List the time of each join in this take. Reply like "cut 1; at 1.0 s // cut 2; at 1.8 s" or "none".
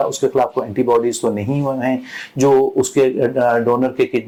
none